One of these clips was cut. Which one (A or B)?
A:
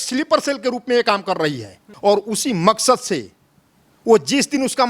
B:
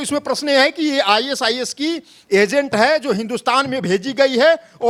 A